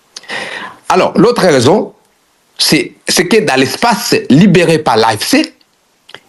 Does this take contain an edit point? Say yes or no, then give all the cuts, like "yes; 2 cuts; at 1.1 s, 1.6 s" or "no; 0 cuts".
no; 0 cuts